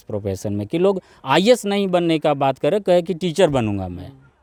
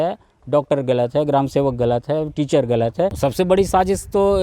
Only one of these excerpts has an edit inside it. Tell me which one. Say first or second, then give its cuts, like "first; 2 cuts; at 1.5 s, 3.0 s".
second; 1 cut; at 3.2 s